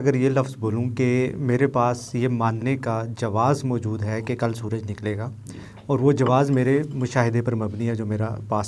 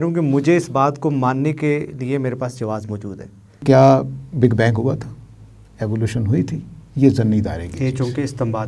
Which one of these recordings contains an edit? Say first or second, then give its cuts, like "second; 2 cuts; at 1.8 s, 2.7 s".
second; 1 cut; at 3.6 s